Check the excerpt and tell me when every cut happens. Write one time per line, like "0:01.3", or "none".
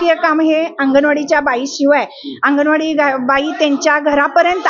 none